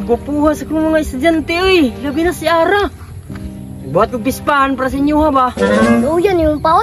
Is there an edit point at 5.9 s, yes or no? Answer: yes